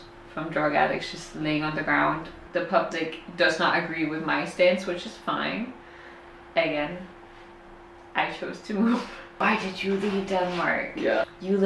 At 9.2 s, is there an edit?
yes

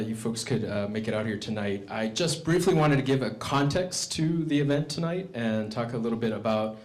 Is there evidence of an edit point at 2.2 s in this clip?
no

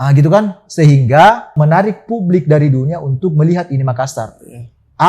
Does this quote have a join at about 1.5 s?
yes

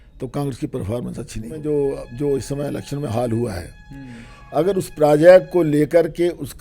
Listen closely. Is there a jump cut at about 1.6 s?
yes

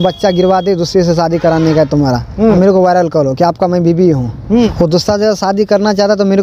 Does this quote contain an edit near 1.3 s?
no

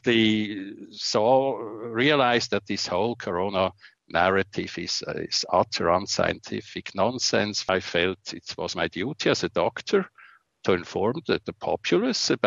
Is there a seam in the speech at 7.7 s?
yes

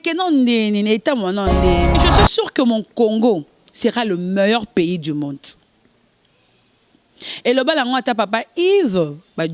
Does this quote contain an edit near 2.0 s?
yes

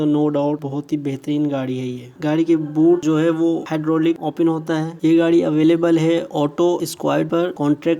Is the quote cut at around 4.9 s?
yes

